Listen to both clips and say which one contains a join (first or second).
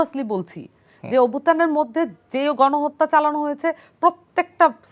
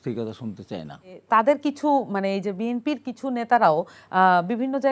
second